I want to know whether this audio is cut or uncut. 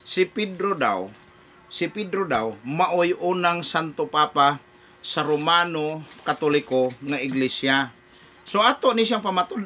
uncut